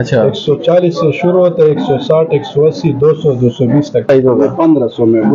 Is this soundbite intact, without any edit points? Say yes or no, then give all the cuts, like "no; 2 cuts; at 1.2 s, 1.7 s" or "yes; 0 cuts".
no; 1 cut; at 4.1 s